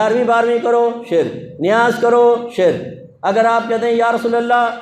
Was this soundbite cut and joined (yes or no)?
no